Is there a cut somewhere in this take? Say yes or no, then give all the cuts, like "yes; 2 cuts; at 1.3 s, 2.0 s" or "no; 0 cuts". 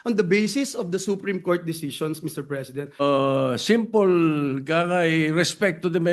yes; 1 cut; at 3.0 s